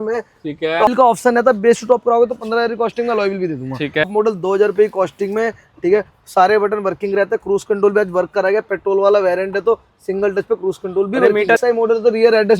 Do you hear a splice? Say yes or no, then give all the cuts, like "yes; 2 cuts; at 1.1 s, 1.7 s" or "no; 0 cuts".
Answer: yes; 3 cuts; at 0.9 s, 4.1 s, 11.6 s